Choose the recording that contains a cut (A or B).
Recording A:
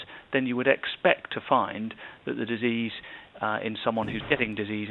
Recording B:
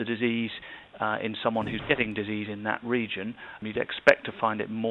B